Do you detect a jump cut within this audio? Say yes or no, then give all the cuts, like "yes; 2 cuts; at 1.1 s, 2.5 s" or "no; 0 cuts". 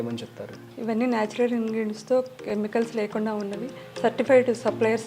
no; 0 cuts